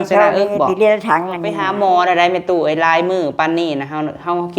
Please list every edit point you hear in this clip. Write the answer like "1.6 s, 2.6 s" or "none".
1.6 s